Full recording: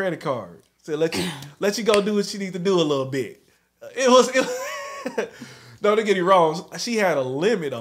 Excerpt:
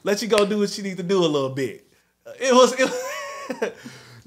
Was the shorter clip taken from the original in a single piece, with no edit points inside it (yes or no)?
yes